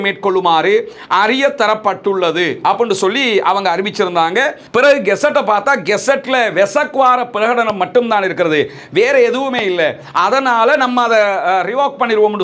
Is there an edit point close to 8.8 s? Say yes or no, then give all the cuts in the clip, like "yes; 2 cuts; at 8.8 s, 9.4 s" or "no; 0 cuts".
no; 1 cut; at 4.6 s